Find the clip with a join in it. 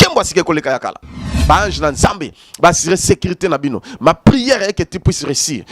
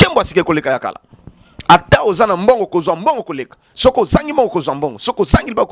first; 1 cut; at 1.3 s

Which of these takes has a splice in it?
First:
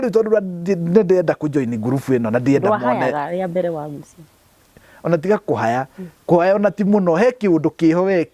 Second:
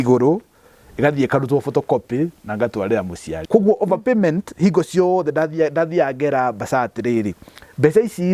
second; 1 cut; at 3.4 s

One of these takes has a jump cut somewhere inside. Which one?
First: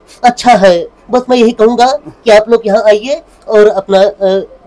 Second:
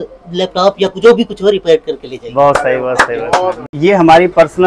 second; 1 cut; at 3.6 s

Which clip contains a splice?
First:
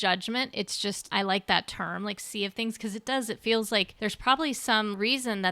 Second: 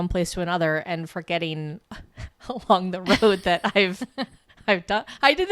first; 2 cuts; at 1.1 s, 3.9 s

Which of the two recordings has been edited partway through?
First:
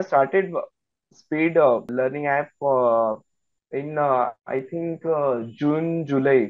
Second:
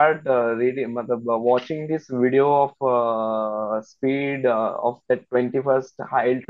first; 1 cut; at 1.9 s

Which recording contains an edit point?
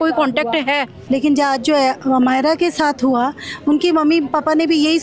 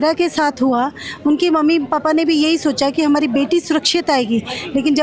first; 1 cut; at 0.9 s

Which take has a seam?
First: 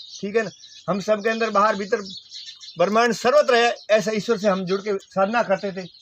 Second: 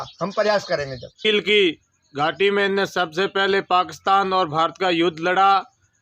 second; 1 cut; at 1.2 s

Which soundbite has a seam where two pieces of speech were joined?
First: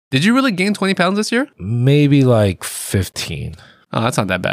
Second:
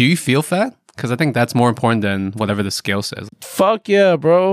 first; 1 cut; at 1.6 s

